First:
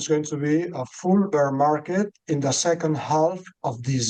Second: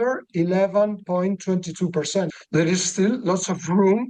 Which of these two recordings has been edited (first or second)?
second